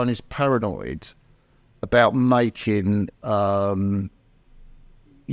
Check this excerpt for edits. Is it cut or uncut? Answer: uncut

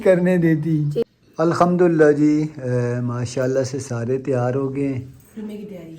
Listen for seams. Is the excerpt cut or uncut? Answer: cut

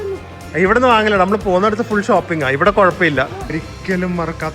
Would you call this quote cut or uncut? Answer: cut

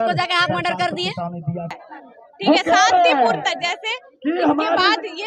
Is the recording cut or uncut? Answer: cut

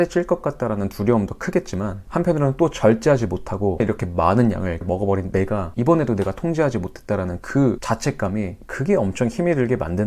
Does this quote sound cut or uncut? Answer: uncut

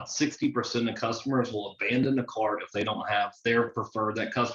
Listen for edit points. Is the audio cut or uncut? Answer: uncut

